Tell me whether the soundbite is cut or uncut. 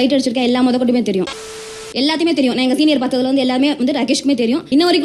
cut